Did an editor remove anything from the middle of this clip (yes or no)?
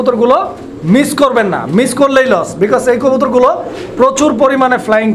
no